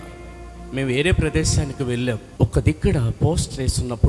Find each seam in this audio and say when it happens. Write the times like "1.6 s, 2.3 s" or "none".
2.3 s